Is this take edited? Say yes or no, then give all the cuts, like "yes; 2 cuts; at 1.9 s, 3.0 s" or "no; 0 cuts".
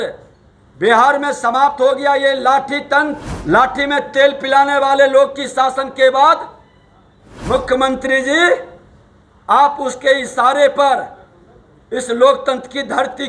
yes; 1 cut; at 3.3 s